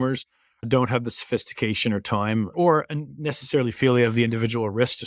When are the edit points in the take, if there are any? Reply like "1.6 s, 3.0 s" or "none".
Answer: 2.5 s